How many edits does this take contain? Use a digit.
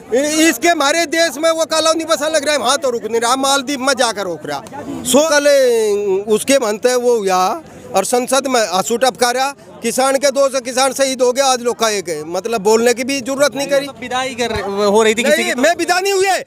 1